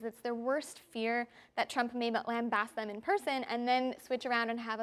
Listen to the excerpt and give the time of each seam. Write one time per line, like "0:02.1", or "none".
none